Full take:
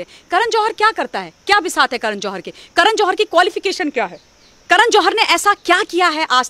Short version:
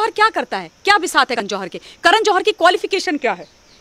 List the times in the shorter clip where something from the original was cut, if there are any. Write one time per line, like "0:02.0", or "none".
0:01.4

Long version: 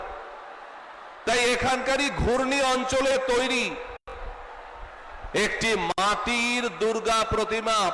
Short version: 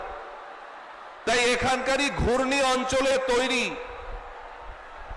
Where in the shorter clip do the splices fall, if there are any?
0:04.0

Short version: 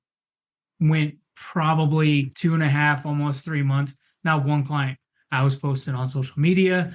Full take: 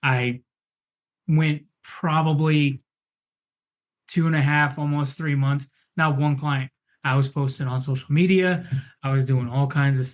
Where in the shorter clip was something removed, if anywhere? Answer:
0:02.3

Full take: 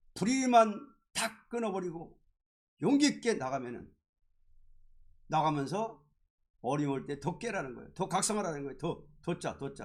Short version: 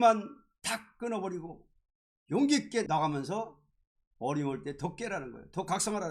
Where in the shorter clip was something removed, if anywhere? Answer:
0:02.9

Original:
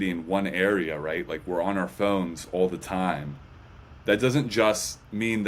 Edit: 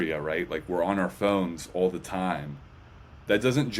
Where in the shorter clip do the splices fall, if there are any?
none

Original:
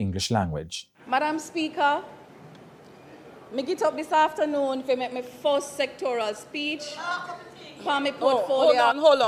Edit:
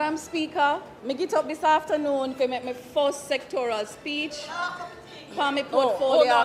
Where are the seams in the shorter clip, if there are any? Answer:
0:00.9

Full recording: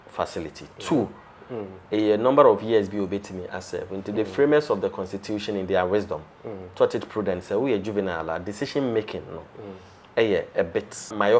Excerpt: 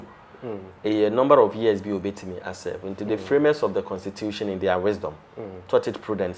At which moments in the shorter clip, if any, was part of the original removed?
none

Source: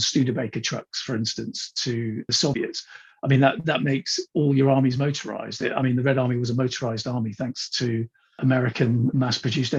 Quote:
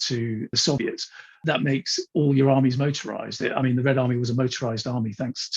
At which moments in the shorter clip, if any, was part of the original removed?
0:01.4

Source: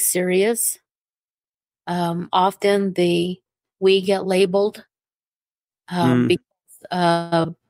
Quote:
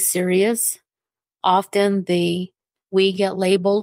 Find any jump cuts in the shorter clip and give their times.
0:01.3

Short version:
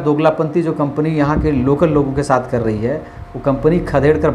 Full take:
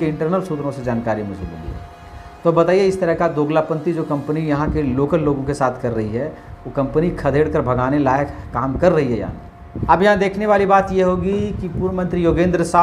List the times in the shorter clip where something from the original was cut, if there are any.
none

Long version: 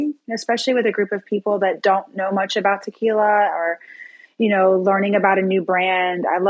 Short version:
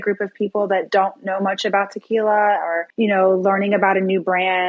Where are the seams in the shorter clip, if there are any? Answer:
0:02.8

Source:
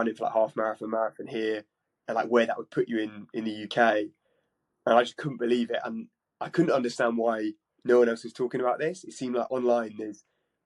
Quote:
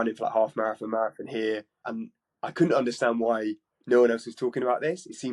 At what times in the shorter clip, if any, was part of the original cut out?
0:01.9

